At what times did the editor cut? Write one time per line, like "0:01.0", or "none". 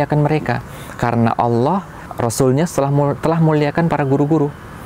0:02.0